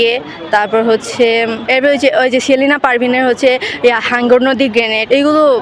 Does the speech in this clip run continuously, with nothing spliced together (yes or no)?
yes